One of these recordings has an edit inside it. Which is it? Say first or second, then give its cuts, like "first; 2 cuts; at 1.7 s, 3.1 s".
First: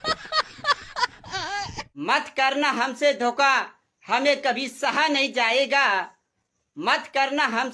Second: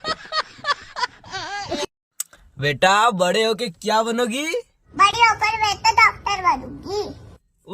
second; 1 cut; at 1.7 s